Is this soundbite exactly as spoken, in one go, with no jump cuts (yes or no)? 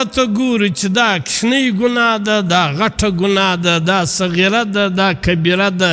yes